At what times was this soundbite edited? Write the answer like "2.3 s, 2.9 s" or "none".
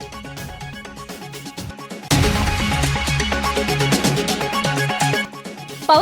1.1 s, 2.1 s, 5.2 s